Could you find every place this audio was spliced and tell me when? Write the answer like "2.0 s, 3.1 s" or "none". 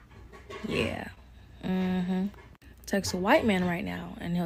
none